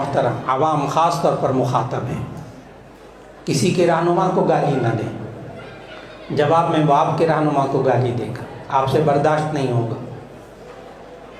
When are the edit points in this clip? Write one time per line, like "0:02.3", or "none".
none